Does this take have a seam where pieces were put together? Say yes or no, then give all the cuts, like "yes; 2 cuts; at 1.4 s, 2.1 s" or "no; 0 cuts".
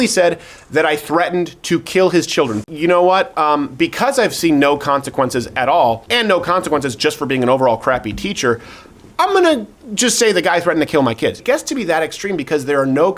yes; 3 cuts; at 2.6 s, 6.0 s, 11.4 s